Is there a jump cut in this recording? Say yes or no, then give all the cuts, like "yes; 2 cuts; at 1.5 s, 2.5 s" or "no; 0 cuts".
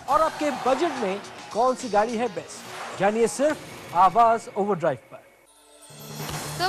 no; 0 cuts